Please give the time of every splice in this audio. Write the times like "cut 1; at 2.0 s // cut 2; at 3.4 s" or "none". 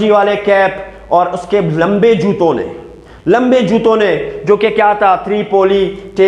none